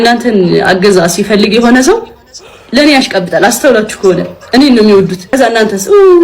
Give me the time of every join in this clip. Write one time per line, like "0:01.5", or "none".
0:05.2